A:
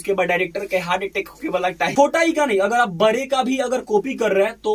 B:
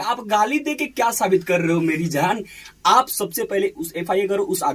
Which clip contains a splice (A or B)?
A